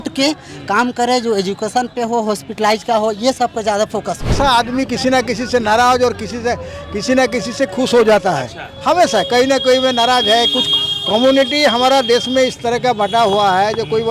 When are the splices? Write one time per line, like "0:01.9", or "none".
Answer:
0:04.3